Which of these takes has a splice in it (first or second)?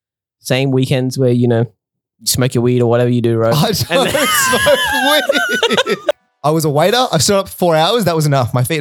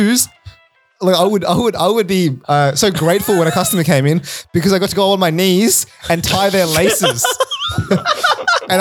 first